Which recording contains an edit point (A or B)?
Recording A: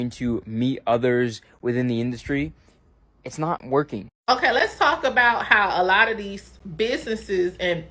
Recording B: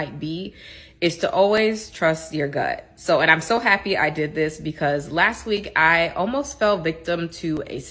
A